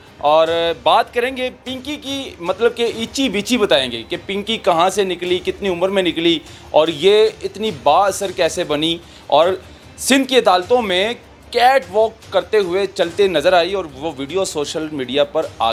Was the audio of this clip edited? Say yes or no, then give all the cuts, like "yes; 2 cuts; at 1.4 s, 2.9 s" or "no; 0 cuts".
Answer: no; 0 cuts